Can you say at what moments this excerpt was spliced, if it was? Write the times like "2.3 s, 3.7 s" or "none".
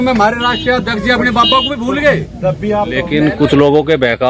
3.0 s